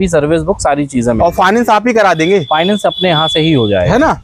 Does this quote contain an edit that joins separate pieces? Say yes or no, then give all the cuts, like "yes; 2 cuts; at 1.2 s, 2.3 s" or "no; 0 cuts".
no; 0 cuts